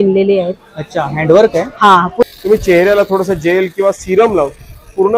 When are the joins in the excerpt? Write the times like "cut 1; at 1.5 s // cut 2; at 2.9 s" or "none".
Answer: cut 1; at 2.2 s